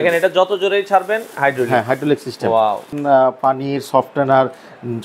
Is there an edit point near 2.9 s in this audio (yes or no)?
yes